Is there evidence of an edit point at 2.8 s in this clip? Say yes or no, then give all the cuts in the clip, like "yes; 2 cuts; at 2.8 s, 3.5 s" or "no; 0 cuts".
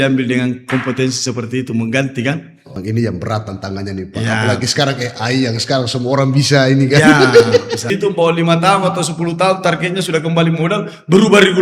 yes; 2 cuts; at 2.8 s, 7.9 s